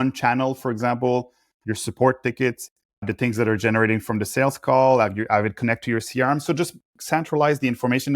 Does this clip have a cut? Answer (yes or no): no